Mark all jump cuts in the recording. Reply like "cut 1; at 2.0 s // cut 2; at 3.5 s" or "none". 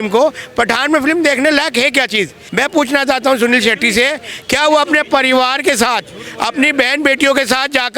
cut 1; at 2.4 s

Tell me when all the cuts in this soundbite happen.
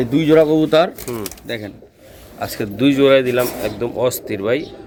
none

